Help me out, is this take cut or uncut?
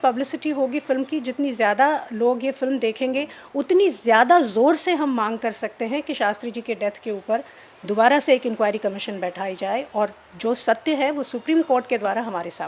uncut